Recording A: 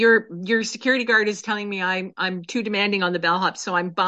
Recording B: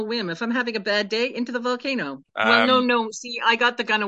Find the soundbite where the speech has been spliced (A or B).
B